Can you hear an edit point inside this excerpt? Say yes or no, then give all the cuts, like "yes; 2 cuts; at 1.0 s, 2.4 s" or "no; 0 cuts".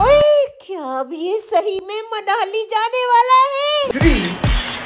yes; 1 cut; at 3.9 s